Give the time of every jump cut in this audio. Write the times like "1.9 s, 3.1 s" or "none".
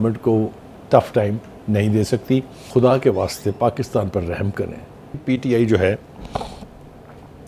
2.6 s, 5.2 s

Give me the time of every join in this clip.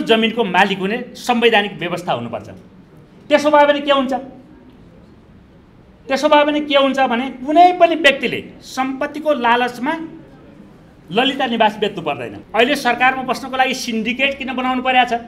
12.3 s

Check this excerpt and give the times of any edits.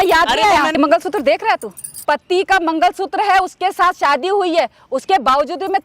0.8 s, 2.0 s

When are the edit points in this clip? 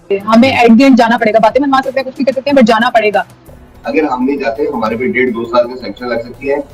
3.4 s

